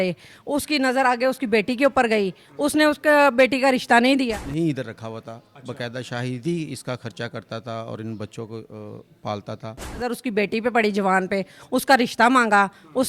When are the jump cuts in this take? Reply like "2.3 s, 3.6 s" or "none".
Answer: 4.3 s, 10.0 s